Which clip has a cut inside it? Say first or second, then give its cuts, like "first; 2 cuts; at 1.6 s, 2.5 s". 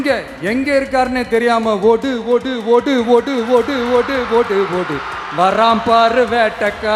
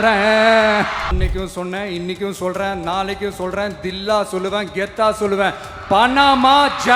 second; 1 cut; at 1.1 s